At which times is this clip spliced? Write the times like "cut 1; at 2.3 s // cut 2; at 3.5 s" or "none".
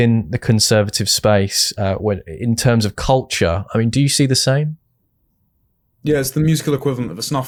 none

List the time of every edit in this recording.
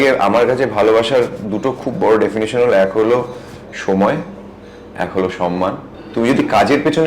cut 1; at 5.9 s

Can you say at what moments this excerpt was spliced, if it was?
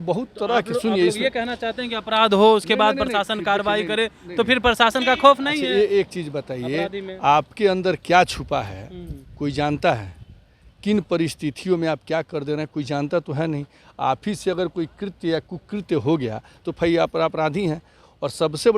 none

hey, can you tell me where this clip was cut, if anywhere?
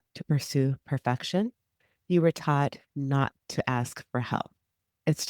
cut 1; at 3.4 s

